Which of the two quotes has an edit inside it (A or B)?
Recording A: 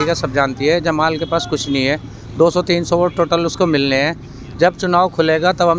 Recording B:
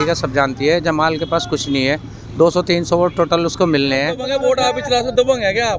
B